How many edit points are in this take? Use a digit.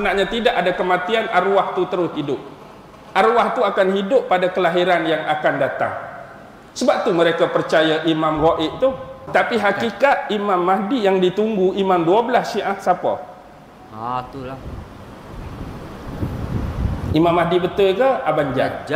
1